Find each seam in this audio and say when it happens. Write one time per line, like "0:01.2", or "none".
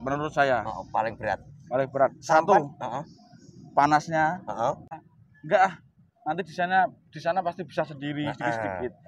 0:05.0